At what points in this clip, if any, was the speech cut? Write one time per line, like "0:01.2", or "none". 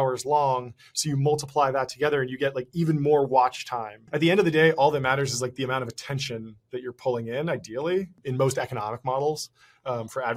0:04.1
0:08.2